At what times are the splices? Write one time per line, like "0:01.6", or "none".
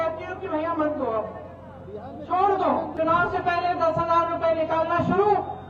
0:02.9

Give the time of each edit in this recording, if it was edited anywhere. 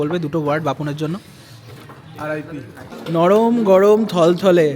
0:03.0

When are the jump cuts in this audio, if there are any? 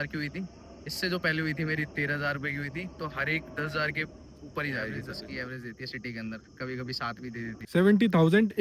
0:05.3
0:07.6

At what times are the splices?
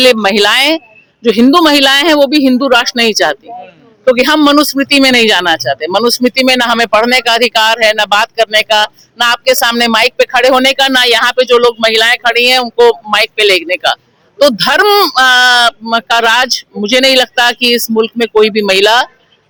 none

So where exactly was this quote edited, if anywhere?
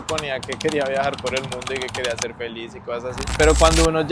0:03.2

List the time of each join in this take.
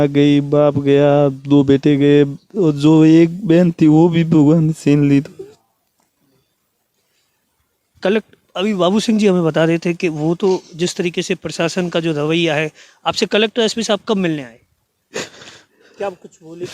none

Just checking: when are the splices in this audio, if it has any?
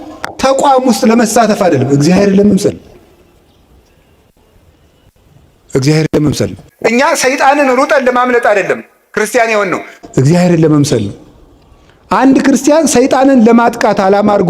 none

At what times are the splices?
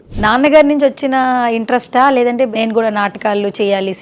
0:02.5

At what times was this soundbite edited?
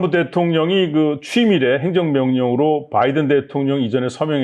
none

